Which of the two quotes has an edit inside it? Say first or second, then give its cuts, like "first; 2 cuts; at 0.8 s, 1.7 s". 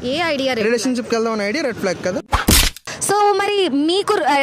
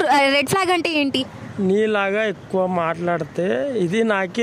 first; 1 cut; at 3.0 s